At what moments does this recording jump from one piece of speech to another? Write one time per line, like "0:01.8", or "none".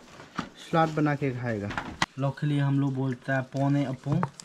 0:02.0